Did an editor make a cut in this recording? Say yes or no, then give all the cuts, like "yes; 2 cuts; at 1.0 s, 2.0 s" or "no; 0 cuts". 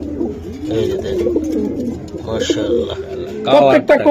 yes; 1 cut; at 3.1 s